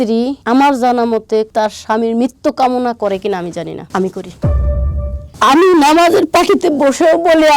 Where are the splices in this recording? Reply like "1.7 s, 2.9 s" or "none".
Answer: 1.5 s